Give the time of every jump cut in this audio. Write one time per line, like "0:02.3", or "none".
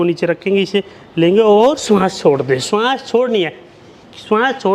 none